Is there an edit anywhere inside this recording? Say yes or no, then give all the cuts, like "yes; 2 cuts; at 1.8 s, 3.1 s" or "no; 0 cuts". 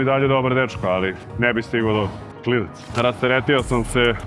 yes; 1 cut; at 2.4 s